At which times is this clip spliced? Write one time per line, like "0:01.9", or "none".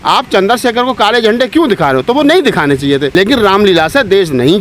0:03.1

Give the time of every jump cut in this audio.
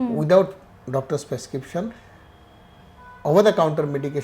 none

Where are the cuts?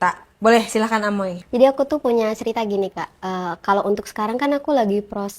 0:01.4

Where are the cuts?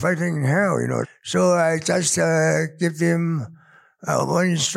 0:01.1

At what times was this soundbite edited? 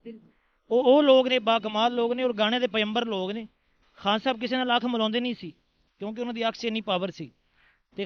none

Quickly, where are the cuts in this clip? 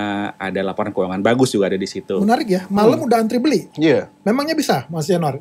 0:02.2

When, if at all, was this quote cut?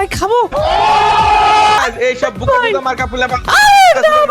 0:01.8

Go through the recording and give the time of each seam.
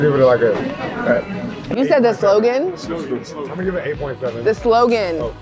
none

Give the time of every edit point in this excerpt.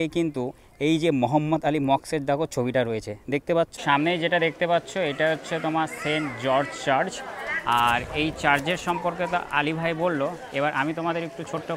0:03.8

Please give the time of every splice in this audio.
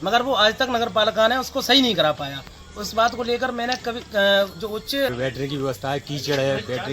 0:05.1

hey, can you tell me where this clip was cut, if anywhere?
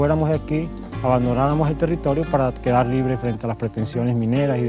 none

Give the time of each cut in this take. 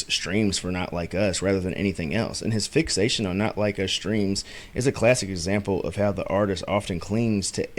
none

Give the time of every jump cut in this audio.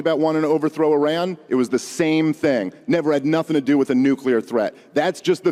none

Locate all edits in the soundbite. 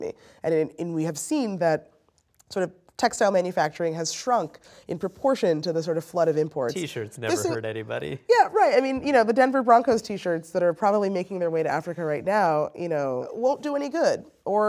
0:13.3

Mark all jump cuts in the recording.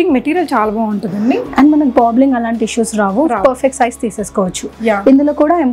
none

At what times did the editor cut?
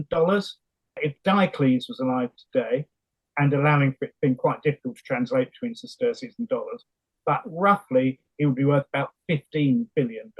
0:01.0

